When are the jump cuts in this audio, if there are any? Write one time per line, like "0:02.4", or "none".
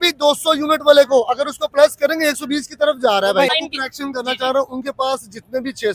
0:03.5

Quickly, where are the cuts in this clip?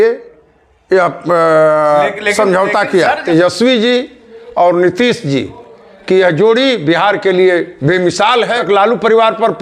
0:03.2
0:08.6

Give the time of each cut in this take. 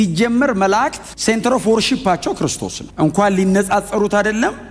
0:01.1

